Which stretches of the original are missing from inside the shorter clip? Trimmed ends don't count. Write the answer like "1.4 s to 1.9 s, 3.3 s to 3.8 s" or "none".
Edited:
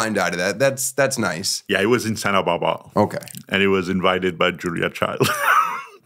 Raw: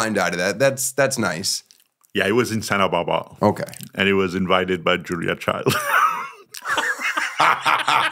1.5 s to 1.9 s

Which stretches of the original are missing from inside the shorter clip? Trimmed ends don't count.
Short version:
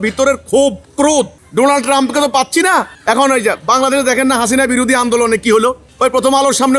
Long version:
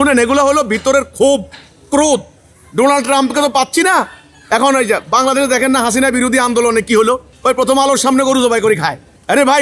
1.8 s to 2.3 s, 4.1 s to 4.4 s

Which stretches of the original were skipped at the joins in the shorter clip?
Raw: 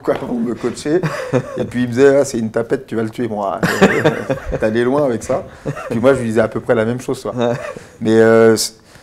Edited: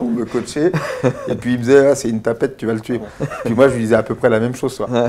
3.3 s to 5.5 s

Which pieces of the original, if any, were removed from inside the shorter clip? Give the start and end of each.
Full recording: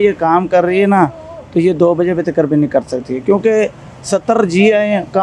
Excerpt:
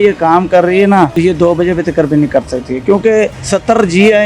1.1 s to 1.5 s, 3.8 s to 4.0 s

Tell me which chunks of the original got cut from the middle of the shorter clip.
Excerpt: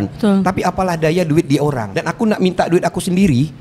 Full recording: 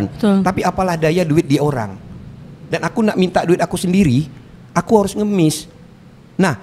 1.9 s to 2.7 s

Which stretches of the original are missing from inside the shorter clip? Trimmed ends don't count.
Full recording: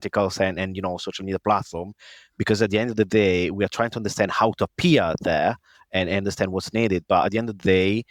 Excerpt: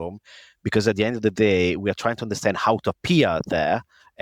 none

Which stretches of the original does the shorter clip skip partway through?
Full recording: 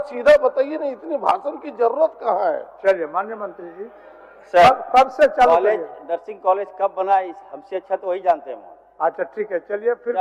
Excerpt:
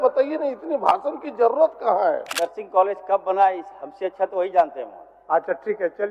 2.7 s to 6.0 s

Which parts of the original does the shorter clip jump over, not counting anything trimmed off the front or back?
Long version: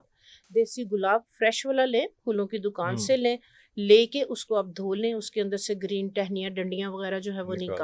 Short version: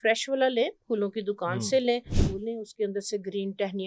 3.6 s to 4.8 s

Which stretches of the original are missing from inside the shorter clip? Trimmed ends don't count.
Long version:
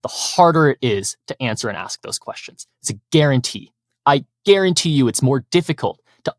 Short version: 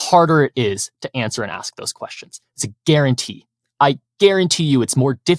none

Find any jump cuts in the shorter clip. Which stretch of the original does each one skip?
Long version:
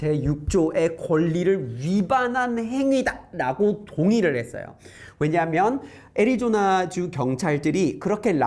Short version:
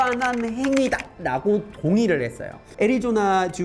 4.7 s to 6.0 s

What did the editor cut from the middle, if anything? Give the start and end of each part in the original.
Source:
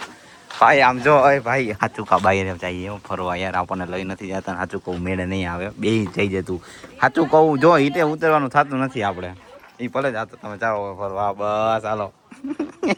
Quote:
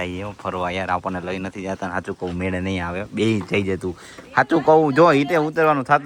none

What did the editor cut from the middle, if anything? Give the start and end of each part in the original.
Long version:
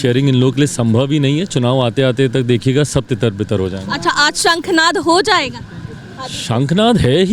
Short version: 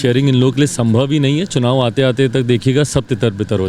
none

